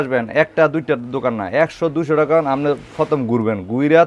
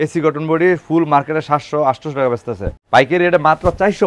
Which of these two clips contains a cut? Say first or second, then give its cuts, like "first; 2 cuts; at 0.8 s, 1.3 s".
second; 1 cut; at 2.7 s